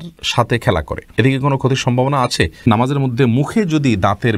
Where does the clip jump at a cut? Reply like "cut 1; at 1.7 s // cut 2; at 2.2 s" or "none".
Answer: cut 1; at 1.0 s // cut 2; at 2.7 s